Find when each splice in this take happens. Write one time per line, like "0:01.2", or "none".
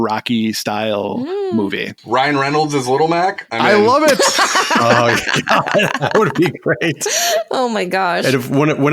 0:01.9